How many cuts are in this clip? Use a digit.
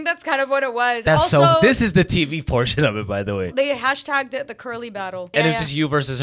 2